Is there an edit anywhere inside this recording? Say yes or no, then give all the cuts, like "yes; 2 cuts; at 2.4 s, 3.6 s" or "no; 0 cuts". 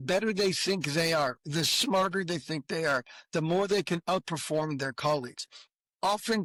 no; 0 cuts